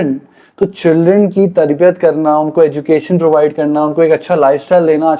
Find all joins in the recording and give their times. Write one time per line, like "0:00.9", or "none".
none